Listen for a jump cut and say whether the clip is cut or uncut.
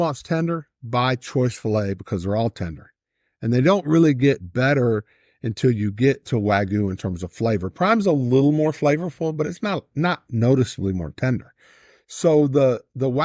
uncut